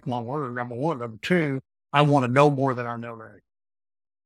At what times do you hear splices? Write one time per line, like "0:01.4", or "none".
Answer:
0:01.7